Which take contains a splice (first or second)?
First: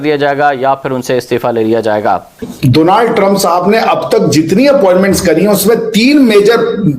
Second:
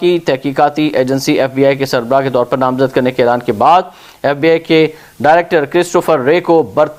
first